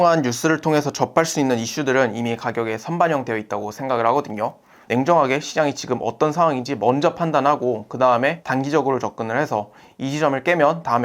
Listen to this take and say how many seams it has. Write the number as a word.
one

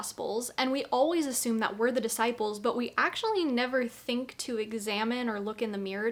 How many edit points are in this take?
zero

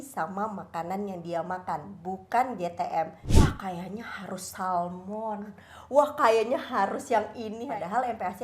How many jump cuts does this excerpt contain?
two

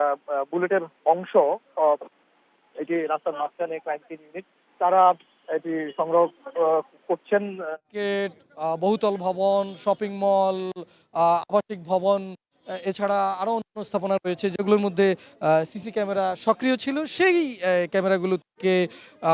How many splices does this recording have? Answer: zero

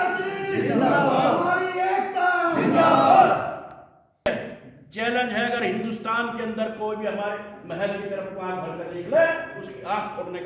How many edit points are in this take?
one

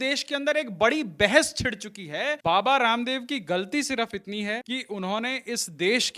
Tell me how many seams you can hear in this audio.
two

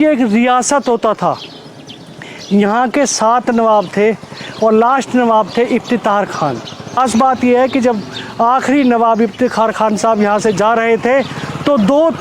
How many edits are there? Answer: one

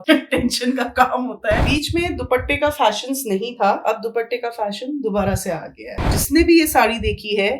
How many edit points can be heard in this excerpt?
two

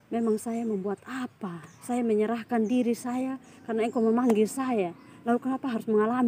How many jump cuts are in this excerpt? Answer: zero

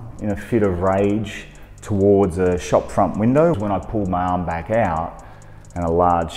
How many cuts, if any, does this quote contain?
one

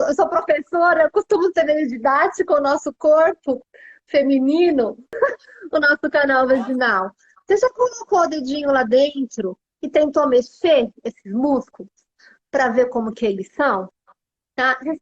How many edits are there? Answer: one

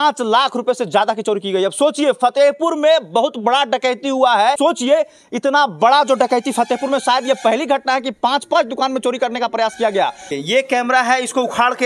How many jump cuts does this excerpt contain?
two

